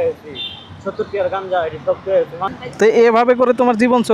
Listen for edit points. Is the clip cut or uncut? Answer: cut